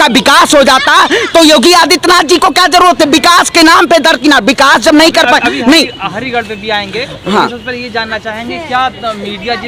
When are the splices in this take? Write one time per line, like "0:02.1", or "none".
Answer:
none